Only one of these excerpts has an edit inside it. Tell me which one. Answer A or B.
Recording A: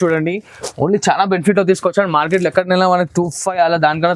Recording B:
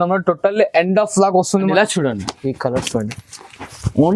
B